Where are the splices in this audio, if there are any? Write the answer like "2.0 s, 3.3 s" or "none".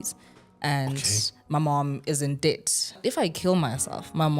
2.9 s